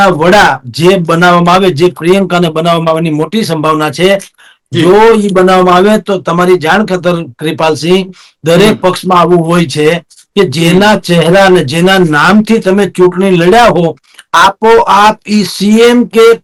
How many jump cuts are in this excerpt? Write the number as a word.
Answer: zero